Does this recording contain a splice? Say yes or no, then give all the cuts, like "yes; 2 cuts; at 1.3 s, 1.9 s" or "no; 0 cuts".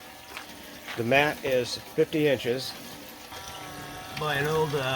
yes; 1 cut; at 3.3 s